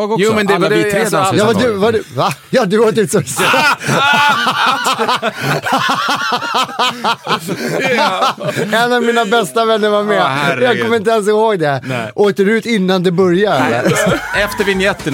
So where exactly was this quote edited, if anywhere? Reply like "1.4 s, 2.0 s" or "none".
none